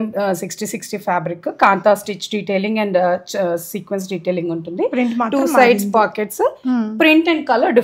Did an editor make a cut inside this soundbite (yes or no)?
no